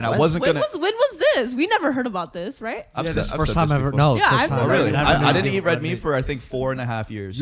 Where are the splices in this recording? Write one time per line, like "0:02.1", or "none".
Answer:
none